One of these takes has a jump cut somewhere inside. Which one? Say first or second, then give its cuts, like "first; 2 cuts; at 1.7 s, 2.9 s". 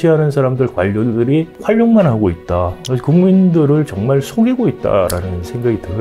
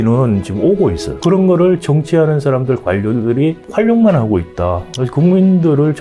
second; 1 cut; at 1.2 s